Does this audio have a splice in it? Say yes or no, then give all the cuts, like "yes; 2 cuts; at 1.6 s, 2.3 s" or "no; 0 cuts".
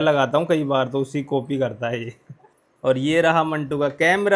no; 0 cuts